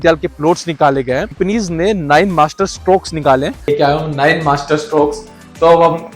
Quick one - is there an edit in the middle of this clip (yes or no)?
yes